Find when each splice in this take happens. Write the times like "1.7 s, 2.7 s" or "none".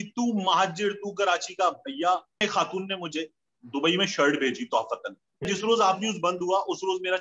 2.4 s, 5.5 s

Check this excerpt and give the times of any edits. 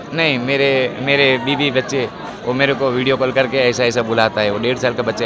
2.3 s

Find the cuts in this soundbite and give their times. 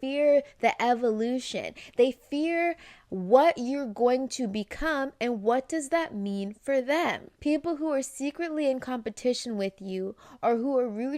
7.3 s

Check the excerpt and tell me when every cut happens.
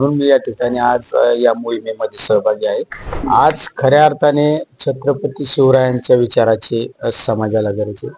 3.1 s

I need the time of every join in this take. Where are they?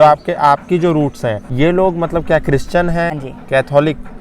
1.4 s, 3.2 s

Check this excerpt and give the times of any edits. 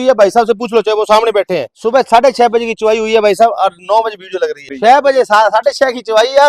1.7 s, 4.7 s

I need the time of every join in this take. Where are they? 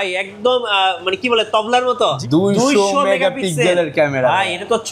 2.2 s

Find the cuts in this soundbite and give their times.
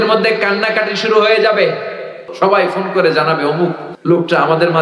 2.2 s, 3.9 s

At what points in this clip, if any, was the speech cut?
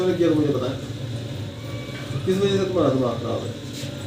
1.5 s

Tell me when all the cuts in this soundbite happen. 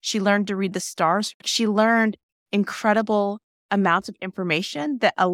1.3 s, 3.5 s

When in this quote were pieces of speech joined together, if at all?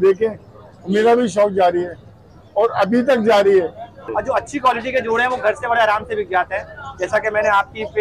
4.1 s

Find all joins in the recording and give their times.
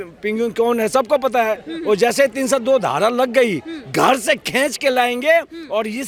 none

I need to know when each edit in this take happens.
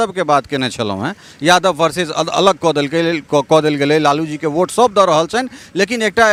none

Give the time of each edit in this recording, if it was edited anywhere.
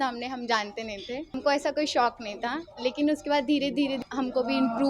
1.4 s, 4.1 s

